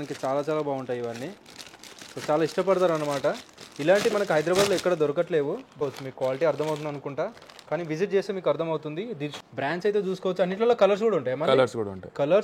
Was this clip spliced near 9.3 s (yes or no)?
yes